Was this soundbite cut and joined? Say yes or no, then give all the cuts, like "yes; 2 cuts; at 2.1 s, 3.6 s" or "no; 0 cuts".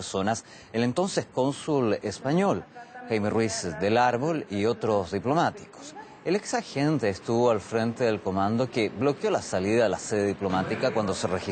yes; 1 cut; at 6.5 s